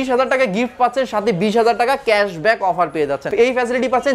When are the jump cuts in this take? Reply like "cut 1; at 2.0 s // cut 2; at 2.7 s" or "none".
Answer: none